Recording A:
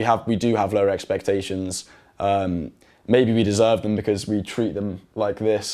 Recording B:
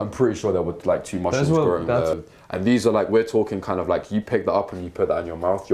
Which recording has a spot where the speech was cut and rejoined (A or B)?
B